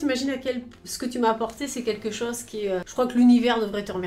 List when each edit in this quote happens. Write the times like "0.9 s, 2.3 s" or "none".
2.9 s